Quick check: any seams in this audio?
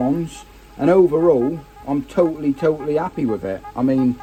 no; 0 cuts

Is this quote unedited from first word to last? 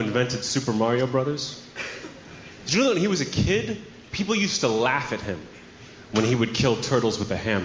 yes; 0 cuts

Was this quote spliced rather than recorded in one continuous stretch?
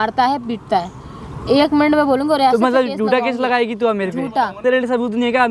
no; 0 cuts

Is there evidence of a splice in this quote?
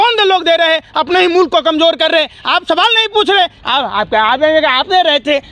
no; 0 cuts

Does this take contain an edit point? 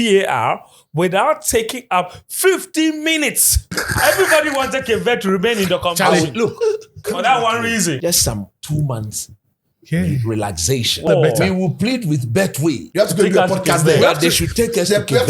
yes; 4 cuts; at 3.8 s, 8.0 s, 11.1 s, 12.8 s

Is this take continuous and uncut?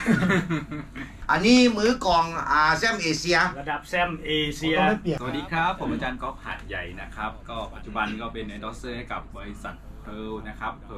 no; 2 cuts; at 0.9 s, 5.2 s

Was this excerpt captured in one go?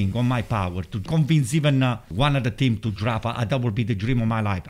no; 2 cuts; at 1.1 s, 2.1 s

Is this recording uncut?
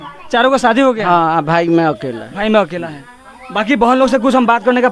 yes; 0 cuts

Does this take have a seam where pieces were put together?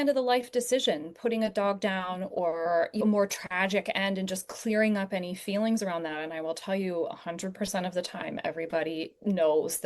yes; 1 cut; at 3.0 s

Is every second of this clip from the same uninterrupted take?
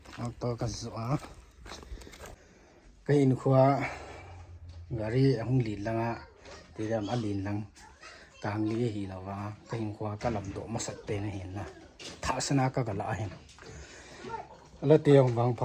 no; 1 cut; at 2.3 s

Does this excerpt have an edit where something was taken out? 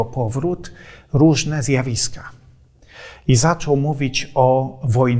no; 0 cuts

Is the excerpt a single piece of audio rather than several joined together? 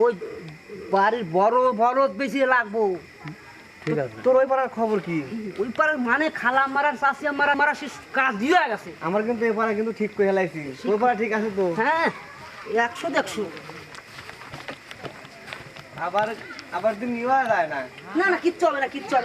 no; 1 cut; at 7.6 s

